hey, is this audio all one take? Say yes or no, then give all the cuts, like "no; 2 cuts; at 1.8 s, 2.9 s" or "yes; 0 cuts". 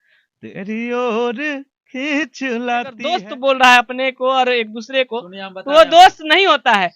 no; 1 cut; at 3.2 s